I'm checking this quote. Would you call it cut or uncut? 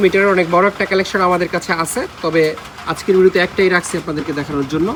uncut